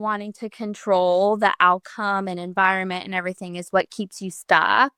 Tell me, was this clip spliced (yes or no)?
no